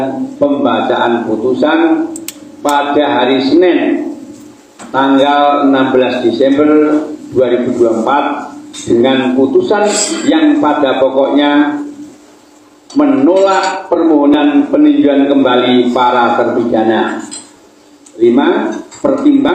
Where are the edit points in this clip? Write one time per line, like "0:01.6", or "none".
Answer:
none